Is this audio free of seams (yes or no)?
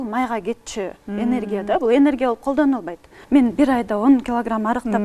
no